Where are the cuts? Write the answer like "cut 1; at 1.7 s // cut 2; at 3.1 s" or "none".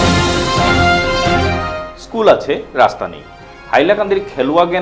cut 1; at 1.6 s